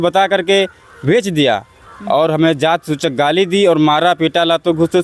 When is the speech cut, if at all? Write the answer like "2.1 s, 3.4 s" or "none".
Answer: none

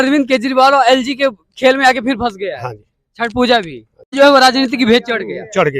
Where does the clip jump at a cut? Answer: 4.1 s

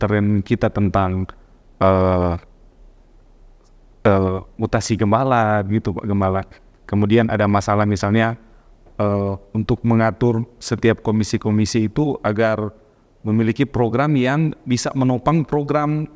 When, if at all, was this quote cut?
none

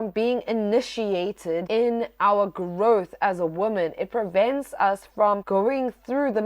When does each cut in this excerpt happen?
1.6 s, 5.4 s

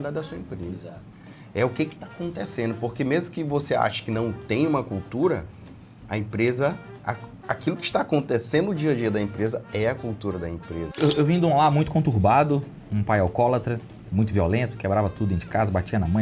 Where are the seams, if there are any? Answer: 10.9 s

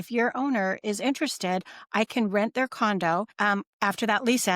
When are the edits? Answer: 3.3 s

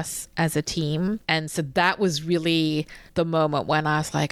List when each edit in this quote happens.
1.2 s, 3.0 s

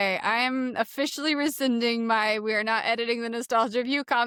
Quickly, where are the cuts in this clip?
none

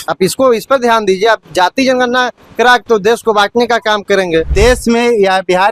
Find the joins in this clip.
4.5 s

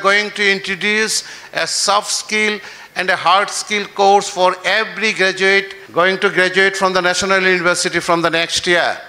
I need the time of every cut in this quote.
5.8 s

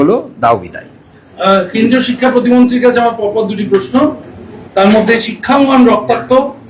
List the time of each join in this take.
none

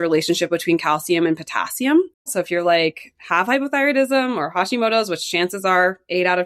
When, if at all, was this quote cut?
2.3 s

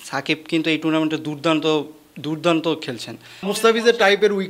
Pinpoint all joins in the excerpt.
3.5 s

